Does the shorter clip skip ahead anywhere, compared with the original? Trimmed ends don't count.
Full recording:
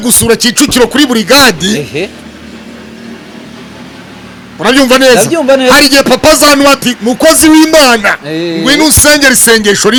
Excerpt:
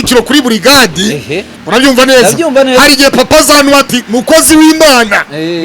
yes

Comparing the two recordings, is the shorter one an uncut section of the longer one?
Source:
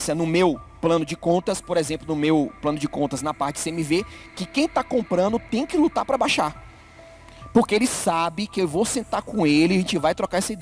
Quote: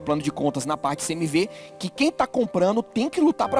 yes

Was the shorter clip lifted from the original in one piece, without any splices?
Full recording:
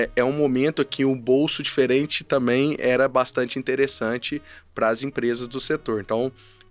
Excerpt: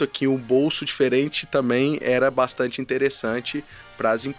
yes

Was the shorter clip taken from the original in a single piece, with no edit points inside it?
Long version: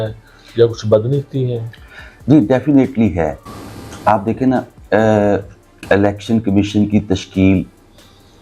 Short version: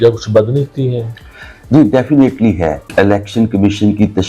no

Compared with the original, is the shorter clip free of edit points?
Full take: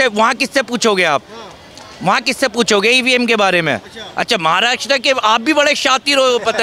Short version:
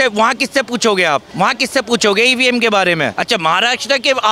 no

